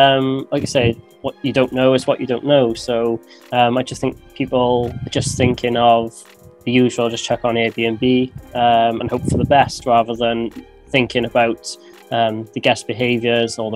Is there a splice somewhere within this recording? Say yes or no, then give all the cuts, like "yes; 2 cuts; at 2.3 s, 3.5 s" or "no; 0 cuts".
no; 0 cuts